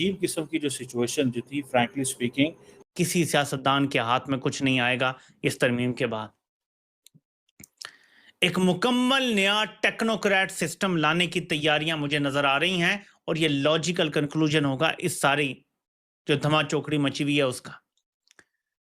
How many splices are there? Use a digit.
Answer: 1